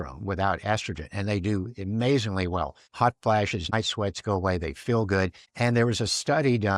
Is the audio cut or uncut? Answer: cut